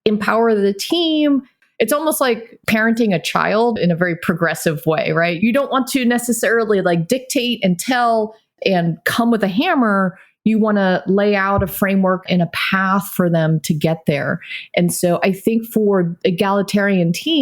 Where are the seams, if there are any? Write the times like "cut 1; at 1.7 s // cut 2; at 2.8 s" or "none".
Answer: cut 1; at 1.6 s